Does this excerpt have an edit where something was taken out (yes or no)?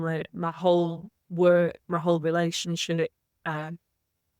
no